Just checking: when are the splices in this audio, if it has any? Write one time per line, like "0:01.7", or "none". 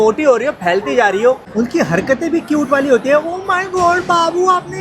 0:01.4